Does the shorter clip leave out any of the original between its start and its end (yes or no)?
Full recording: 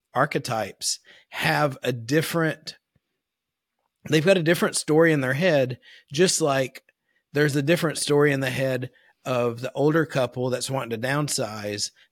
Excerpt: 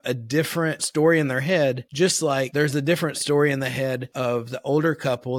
yes